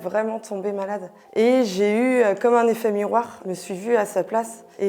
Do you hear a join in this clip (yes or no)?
yes